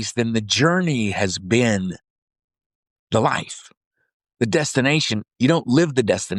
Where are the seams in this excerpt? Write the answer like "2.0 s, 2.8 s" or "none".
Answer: none